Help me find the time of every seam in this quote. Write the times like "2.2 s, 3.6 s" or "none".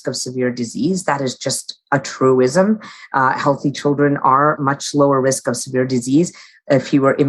4.6 s

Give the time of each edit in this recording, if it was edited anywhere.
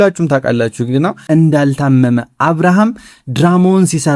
1.2 s

